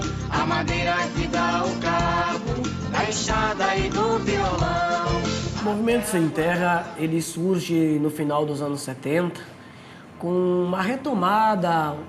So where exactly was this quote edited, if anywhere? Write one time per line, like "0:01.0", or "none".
0:03.8